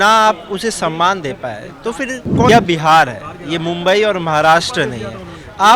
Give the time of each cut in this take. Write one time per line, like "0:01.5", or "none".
0:02.5